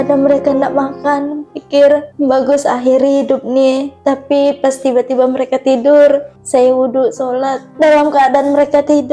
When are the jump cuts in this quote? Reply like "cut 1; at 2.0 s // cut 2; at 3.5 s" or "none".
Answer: cut 1; at 2.1 s // cut 2; at 3.9 s // cut 3; at 6.4 s // cut 4; at 7.6 s